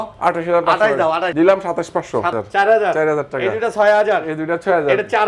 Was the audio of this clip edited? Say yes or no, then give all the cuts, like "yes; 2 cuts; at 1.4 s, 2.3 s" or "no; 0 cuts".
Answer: yes; 2 cuts; at 1.3 s, 2.3 s